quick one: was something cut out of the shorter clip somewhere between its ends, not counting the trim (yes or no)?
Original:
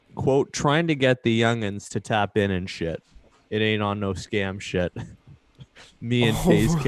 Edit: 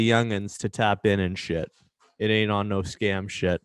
no